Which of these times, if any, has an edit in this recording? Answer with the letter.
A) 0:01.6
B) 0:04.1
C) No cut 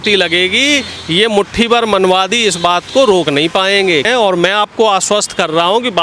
B